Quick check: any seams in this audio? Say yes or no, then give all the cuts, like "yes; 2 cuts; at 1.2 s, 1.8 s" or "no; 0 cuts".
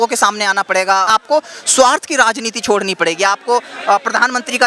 yes; 1 cut; at 1.1 s